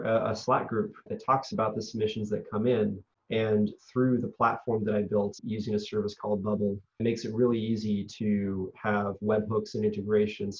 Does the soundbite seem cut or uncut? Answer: cut